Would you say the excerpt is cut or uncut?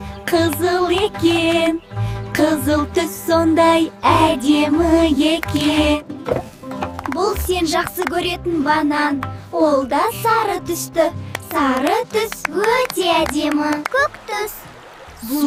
uncut